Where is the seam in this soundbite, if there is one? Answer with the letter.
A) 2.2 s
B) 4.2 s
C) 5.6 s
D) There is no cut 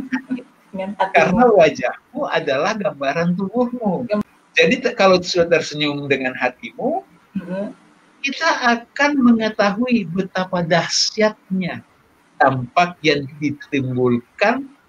B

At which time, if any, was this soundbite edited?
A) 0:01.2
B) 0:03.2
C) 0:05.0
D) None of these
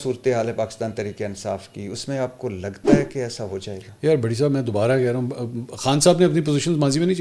D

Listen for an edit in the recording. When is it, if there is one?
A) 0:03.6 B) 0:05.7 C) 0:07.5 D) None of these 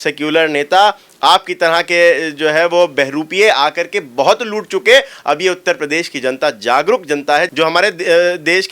C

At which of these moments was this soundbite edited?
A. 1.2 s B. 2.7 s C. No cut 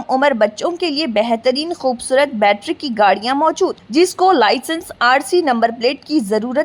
C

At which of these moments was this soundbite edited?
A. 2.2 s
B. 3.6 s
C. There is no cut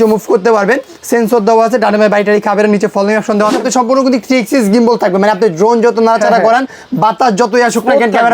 B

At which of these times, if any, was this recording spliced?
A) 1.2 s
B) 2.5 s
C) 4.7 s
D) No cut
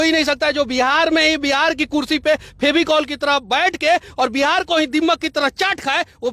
D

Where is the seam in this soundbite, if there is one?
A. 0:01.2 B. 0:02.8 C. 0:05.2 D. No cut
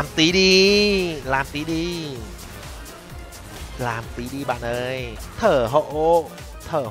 C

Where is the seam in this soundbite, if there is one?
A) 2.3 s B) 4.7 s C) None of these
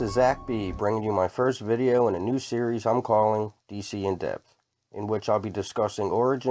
A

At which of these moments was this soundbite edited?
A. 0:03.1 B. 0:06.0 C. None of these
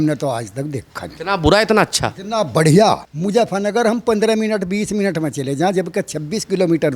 A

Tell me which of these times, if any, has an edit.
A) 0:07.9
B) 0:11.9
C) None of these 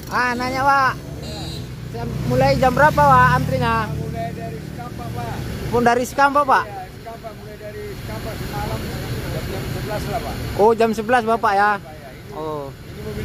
C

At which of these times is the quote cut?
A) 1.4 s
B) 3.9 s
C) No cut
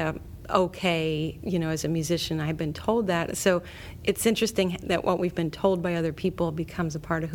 A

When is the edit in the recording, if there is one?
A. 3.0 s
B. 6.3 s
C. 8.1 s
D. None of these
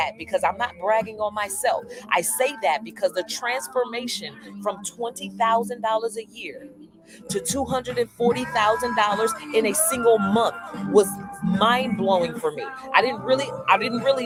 D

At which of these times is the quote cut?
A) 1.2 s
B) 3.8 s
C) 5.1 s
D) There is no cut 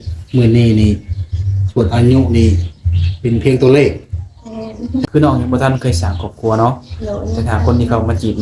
C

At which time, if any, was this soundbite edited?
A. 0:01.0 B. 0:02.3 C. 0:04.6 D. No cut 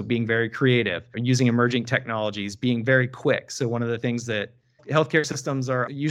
A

